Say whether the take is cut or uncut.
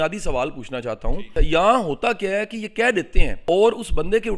cut